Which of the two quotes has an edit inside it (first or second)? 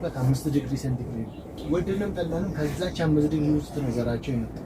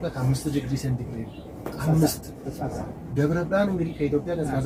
first